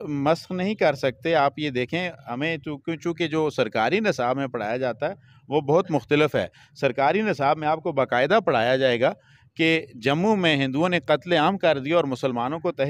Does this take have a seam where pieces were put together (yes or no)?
no